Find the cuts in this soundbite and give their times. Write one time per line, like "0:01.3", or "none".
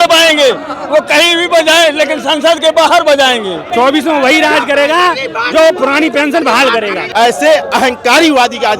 0:03.6
0:07.0